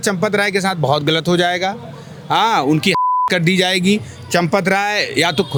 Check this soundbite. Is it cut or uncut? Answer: uncut